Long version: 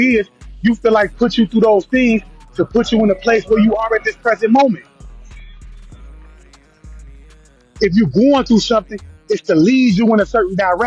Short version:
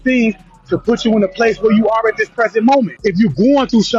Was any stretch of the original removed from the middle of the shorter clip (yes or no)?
yes